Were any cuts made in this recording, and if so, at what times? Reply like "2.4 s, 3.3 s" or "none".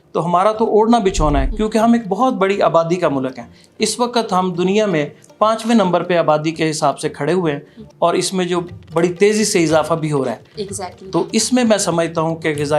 1.5 s